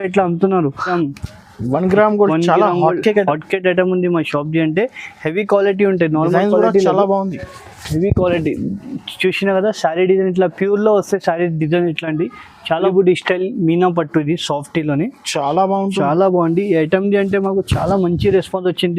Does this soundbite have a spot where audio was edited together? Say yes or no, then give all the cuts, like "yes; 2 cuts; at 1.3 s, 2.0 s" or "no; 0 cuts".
yes; 2 cuts; at 0.9 s, 12.9 s